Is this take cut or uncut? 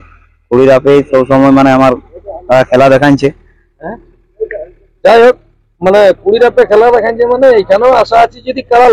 uncut